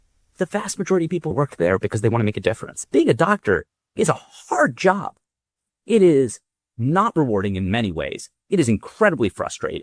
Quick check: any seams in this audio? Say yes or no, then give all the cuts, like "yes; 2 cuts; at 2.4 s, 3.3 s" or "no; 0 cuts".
yes; 2 cuts; at 1.3 s, 2.7 s